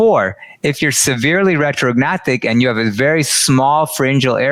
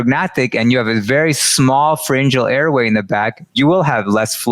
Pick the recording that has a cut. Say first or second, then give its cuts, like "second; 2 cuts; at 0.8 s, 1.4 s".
second; 1 cut; at 3.5 s